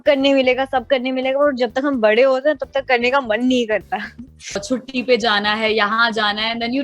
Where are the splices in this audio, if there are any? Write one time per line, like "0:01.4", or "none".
0:04.6